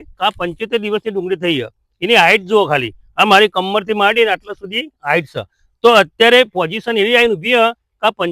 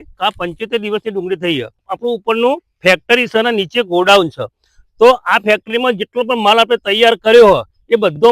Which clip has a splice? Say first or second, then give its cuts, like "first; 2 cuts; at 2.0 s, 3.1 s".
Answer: second; 1 cut; at 1.9 s